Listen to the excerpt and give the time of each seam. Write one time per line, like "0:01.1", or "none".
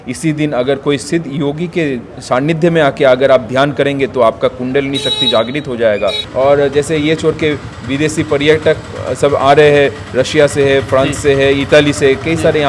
0:06.2